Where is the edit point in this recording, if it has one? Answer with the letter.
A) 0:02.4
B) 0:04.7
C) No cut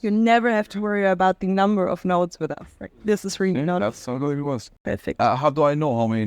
B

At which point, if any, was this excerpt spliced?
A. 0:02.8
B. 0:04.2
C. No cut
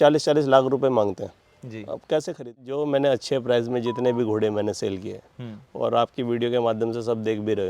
A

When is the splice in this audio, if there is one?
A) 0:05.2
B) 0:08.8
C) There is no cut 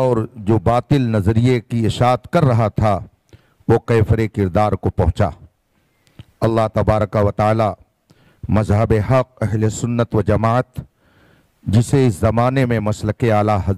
C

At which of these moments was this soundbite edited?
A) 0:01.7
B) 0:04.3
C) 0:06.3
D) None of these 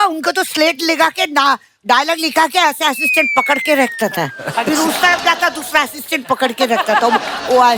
D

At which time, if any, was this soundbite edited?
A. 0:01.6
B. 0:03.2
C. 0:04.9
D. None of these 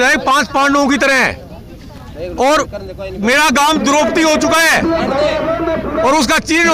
D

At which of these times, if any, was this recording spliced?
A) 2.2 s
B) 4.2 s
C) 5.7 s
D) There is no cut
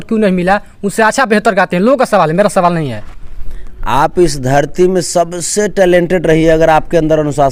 D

